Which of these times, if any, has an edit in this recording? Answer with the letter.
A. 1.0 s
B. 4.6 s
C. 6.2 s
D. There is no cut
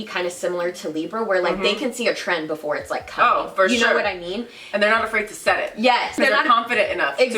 C